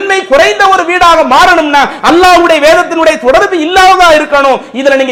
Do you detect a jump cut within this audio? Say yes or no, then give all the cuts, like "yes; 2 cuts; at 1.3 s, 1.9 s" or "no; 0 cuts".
no; 0 cuts